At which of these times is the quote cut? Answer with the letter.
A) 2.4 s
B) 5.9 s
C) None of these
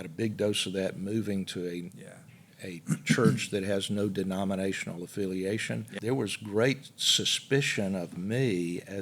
B